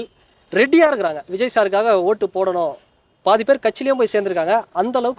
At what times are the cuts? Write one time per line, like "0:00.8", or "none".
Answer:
none

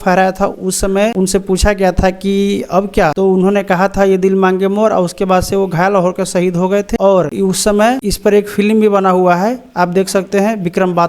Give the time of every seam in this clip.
0:01.1
0:03.1
0:07.0
0:08.0

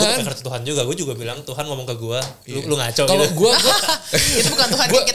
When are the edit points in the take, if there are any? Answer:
none

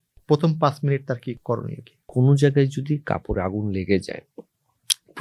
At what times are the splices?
0:02.1

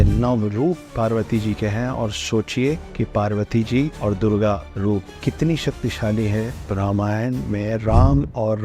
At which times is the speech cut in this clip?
0:02.9
0:03.9
0:04.8
0:06.7

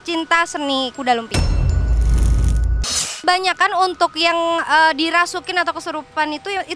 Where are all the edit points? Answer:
0:01.3
0:03.2

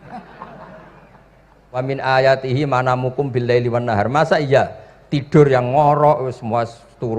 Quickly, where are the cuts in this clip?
0:01.8

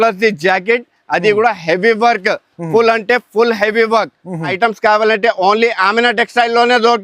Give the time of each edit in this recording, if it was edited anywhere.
0:04.5

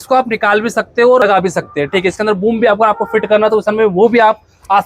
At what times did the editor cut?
0:01.2

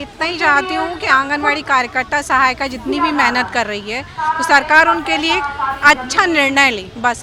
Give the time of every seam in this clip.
none

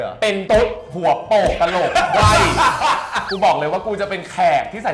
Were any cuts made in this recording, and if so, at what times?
0:03.2

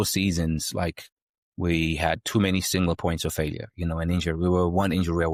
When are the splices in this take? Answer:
none

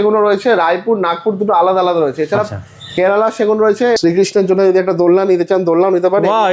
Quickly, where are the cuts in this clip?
0:04.0

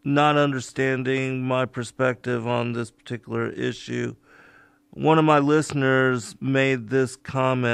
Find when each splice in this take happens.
none

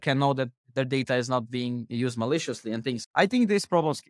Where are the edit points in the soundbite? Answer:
none

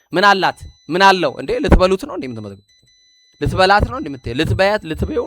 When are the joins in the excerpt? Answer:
none

